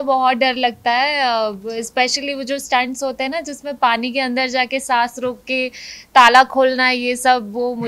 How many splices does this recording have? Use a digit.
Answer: 0